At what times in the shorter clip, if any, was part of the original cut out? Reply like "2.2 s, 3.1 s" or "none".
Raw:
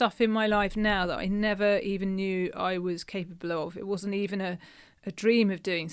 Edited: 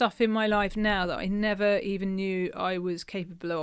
none